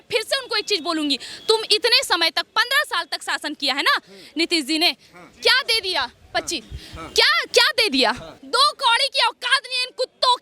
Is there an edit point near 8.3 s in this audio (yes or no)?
yes